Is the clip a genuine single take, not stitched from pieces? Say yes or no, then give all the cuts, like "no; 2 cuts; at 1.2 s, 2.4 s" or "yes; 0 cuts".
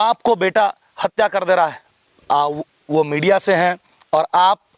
yes; 0 cuts